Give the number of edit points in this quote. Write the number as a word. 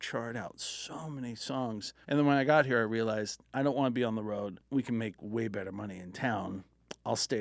two